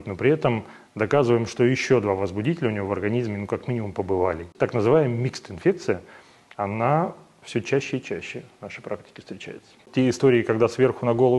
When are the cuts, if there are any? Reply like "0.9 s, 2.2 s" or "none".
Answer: 4.5 s, 9.8 s